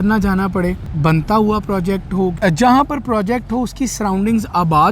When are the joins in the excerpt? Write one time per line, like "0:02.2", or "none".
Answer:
0:00.9
0:02.3